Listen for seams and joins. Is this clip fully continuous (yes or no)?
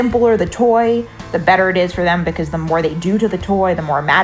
yes